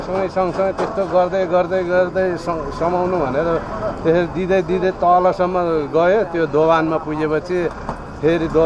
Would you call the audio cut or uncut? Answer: uncut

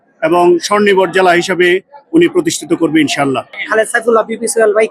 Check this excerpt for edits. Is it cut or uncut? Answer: cut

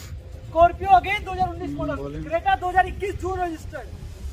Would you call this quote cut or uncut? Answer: uncut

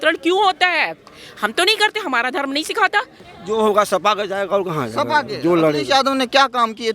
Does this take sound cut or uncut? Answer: cut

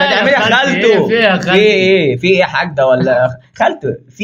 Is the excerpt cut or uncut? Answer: uncut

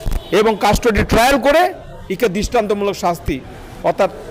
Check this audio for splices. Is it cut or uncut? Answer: uncut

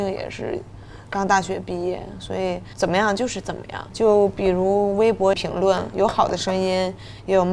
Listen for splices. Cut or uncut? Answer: cut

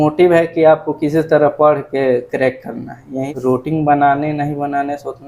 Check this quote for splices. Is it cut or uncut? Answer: cut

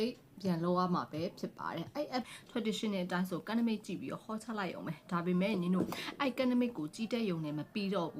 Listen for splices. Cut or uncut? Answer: cut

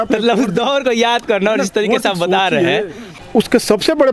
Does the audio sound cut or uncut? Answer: cut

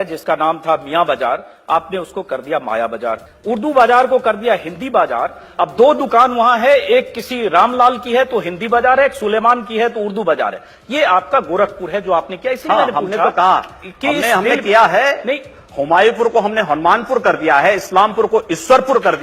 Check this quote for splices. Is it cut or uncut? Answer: cut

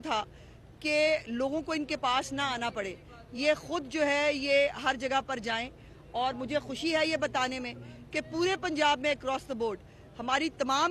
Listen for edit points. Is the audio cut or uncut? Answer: uncut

